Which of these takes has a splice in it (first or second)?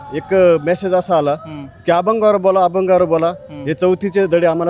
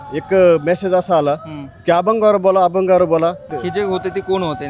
second